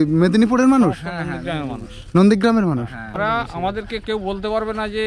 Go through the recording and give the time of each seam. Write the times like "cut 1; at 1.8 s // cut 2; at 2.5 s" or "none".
cut 1; at 3.0 s